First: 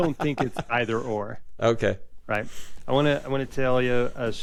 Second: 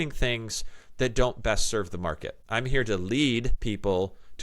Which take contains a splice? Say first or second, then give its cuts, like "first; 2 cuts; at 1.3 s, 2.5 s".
second; 2 cuts; at 2.3 s, 3.5 s